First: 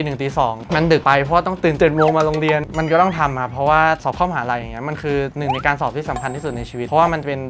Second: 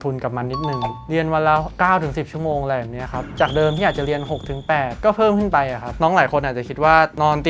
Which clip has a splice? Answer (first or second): first